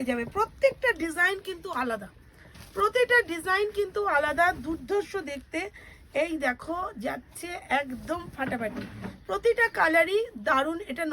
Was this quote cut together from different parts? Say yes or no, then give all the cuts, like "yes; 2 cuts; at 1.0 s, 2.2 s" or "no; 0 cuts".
no; 0 cuts